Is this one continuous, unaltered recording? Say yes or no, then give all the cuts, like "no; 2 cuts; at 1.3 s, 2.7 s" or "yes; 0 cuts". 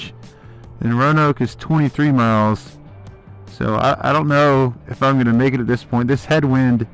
yes; 0 cuts